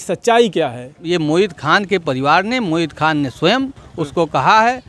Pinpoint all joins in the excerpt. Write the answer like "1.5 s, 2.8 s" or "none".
1.0 s